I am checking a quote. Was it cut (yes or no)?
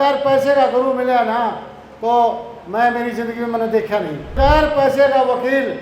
yes